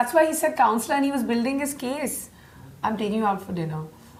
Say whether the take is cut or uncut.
uncut